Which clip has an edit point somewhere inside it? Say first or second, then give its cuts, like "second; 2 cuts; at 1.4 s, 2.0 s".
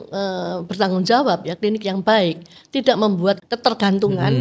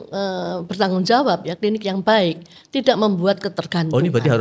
first; 1 cut; at 3.4 s